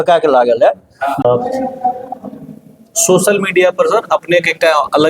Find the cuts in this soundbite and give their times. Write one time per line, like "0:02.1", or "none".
0:01.2